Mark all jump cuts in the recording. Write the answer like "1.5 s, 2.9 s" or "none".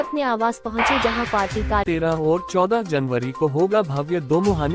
1.8 s